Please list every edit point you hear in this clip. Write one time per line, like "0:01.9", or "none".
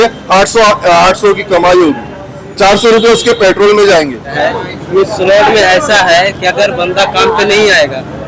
0:04.3